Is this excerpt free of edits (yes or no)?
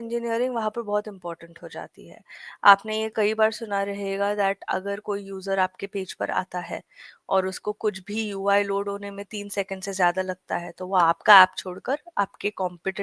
yes